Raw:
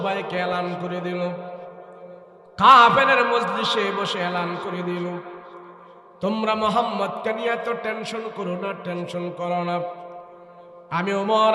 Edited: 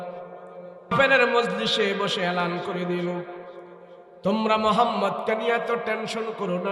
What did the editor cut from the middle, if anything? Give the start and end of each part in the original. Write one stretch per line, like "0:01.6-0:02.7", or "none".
0:02.4-0:02.9